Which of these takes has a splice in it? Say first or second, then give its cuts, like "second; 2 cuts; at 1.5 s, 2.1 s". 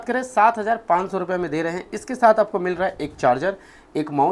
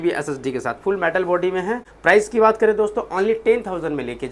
second; 1 cut; at 1.9 s